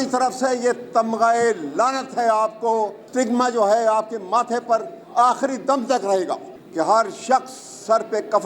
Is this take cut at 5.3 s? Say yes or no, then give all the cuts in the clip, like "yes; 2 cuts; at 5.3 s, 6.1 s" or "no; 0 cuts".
no; 2 cuts; at 3.0 s, 6.6 s